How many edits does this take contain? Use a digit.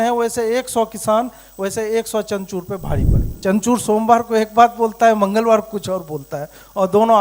1